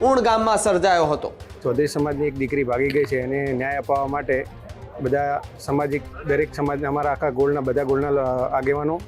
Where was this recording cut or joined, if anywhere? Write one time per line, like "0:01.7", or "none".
0:01.4